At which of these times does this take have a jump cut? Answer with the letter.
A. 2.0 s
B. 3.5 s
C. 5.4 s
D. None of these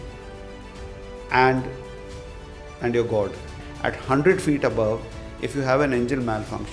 B